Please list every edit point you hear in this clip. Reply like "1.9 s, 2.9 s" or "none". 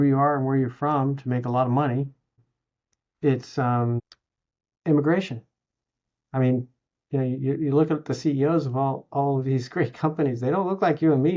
none